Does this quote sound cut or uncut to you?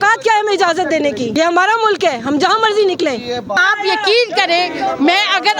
cut